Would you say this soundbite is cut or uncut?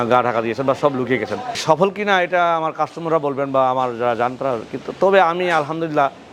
cut